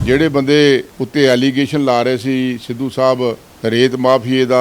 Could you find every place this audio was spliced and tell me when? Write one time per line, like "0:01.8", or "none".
0:01.0
0:03.5

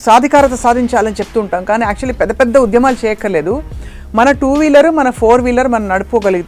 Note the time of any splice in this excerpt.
none

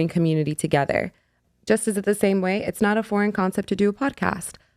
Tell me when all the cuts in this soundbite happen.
0:01.4

